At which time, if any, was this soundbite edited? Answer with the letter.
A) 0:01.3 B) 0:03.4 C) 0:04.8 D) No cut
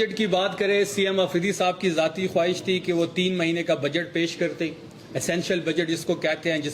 D